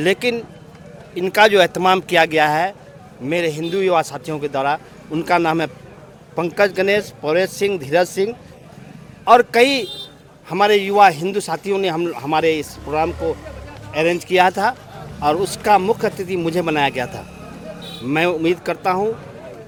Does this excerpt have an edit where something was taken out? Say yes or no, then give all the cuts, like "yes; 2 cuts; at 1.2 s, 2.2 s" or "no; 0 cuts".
no; 0 cuts